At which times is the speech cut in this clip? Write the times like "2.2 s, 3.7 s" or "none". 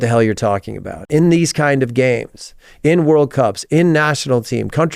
none